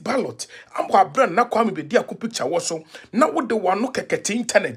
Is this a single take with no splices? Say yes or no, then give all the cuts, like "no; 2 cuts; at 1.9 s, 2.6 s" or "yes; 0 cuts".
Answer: yes; 0 cuts